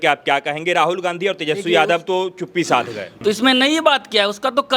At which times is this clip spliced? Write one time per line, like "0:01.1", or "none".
0:03.1